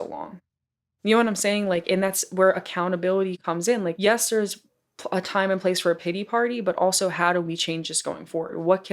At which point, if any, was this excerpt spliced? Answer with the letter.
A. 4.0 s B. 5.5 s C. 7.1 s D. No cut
A